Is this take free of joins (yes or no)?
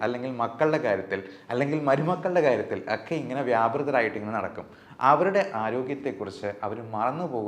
yes